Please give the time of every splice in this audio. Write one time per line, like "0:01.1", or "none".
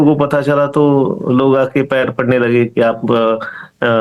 none